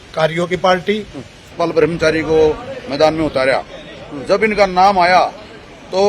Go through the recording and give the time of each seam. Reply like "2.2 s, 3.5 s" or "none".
1.4 s